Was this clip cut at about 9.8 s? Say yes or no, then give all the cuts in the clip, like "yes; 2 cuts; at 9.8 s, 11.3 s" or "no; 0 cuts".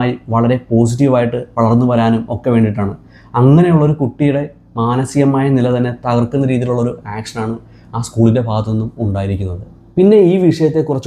yes; 1 cut; at 9.8 s